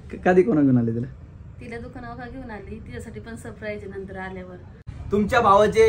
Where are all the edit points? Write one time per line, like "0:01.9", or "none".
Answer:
0:04.9

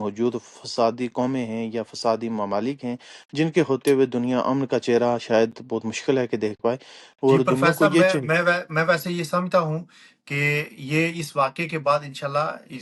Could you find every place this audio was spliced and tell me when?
none

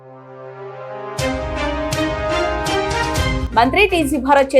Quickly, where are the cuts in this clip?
0:03.4

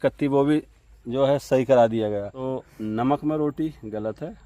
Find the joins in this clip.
0:02.3

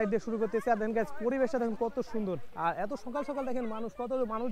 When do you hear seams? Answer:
none

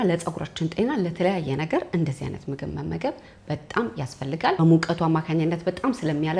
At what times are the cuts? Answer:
0:04.6

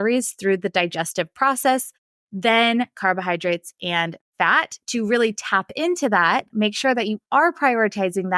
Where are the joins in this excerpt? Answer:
0:06.5

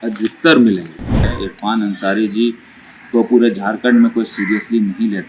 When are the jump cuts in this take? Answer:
0:01.3

